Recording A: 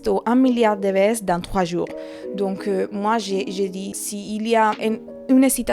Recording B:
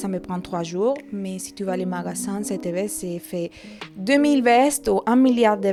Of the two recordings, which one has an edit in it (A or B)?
A